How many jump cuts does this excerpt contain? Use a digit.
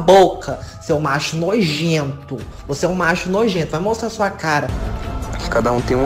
1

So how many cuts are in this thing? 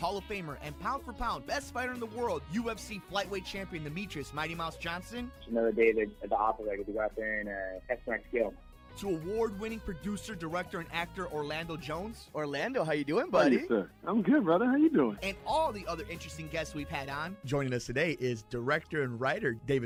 0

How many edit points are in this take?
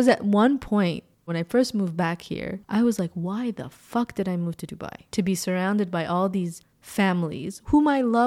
2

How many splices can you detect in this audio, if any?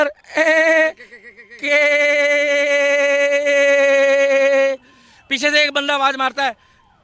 0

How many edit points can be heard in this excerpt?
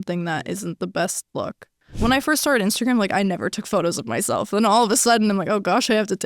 1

